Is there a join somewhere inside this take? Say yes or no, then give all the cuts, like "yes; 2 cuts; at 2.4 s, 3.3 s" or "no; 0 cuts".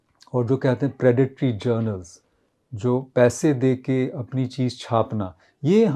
no; 0 cuts